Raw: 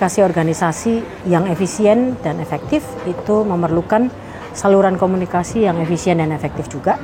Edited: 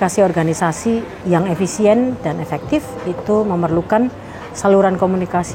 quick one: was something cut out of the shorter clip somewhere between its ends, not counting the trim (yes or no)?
no